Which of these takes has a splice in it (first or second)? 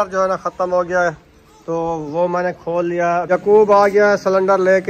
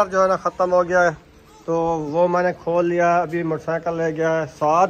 first